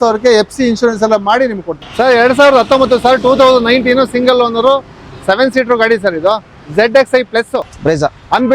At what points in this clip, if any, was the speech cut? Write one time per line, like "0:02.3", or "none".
0:01.9
0:07.7

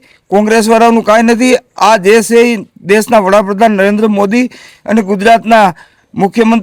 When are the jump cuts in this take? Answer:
none

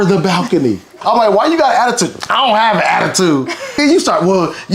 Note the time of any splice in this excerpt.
0:01.0
0:03.8

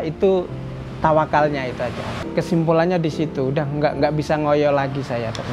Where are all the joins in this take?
0:02.1

